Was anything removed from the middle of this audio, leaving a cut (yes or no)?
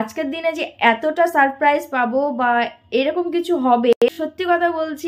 yes